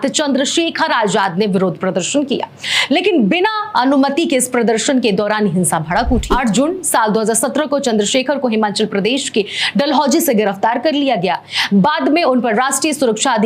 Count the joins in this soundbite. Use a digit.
1